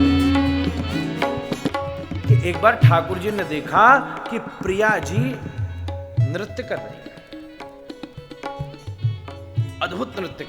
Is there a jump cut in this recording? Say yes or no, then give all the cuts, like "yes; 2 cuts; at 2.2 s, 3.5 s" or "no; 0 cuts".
yes; 1 cut; at 1.7 s